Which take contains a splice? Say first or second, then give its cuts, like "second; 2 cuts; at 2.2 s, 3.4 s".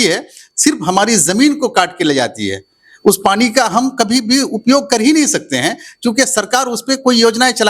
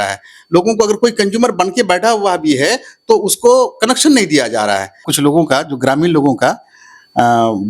second; 1 cut; at 5.0 s